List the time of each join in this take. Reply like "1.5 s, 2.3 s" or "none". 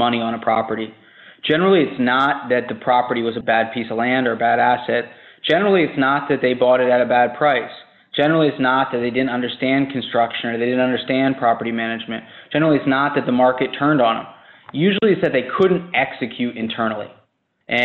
none